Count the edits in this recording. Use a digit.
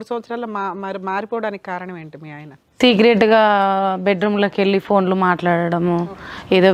0